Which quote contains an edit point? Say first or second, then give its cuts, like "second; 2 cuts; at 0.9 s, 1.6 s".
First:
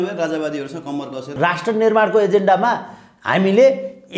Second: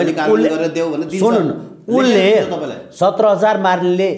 first; 1 cut; at 1.3 s